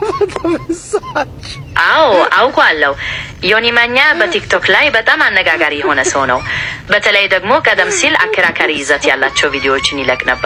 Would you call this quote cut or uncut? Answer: uncut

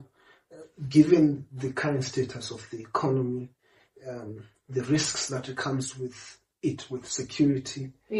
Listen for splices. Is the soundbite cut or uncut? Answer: uncut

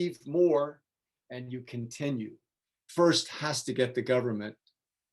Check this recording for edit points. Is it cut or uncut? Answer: cut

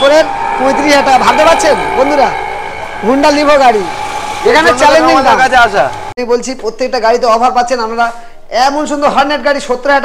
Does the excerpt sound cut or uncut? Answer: cut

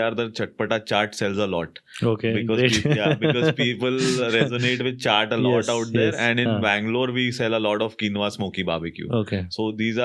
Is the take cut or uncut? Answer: uncut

